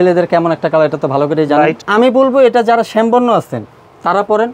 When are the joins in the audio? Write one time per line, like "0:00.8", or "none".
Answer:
0:01.9